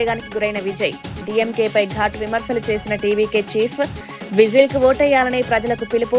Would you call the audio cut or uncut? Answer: uncut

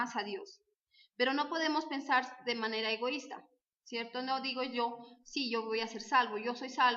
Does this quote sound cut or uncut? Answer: uncut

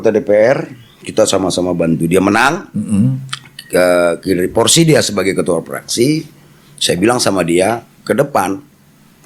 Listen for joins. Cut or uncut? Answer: uncut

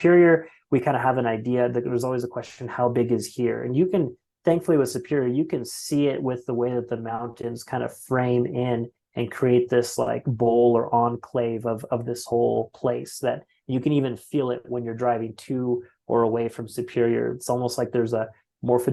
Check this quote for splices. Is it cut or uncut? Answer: uncut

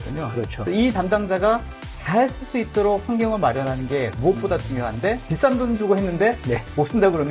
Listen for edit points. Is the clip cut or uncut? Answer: cut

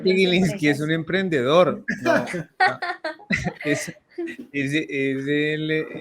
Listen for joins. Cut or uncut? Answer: uncut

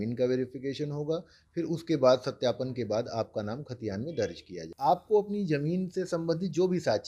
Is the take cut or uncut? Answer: cut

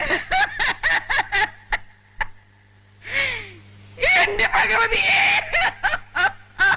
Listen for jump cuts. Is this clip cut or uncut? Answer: uncut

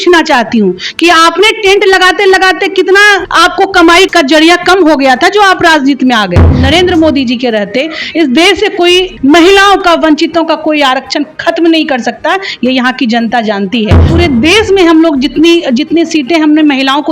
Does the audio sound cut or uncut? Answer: cut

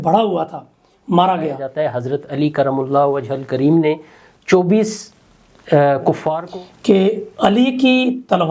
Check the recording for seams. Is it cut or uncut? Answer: cut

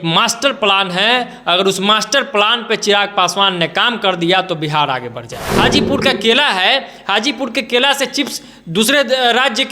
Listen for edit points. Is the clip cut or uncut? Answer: cut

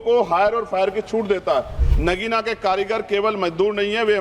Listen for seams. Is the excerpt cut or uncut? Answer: cut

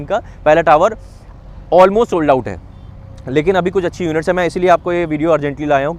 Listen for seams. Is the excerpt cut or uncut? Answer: uncut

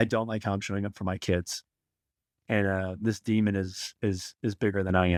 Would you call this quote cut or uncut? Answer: uncut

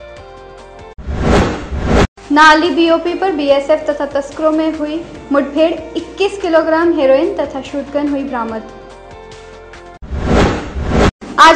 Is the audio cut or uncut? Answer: cut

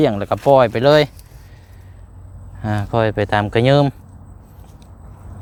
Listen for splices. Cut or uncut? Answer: uncut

